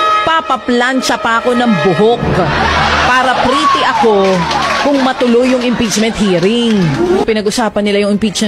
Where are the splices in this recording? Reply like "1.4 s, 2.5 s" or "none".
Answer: 7.2 s